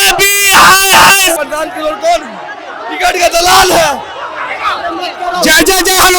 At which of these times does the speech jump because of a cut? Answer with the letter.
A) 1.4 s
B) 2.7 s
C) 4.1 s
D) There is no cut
A